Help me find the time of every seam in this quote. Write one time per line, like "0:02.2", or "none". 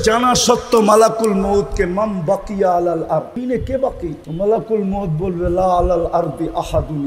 0:03.4
0:04.2